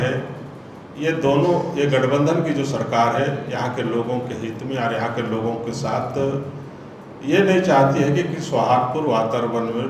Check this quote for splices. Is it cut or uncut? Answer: uncut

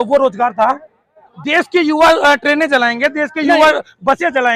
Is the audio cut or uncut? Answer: cut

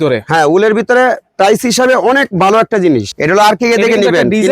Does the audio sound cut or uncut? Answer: cut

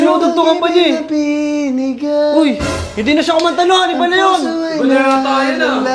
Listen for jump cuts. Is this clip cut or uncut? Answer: uncut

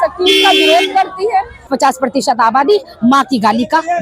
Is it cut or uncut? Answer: cut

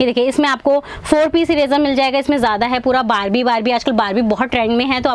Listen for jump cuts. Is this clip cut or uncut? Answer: uncut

